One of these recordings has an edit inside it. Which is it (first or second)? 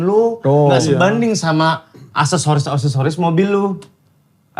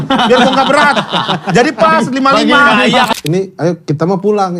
second